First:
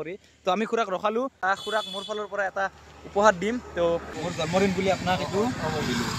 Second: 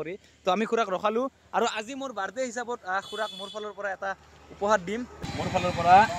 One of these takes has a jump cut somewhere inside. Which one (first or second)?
first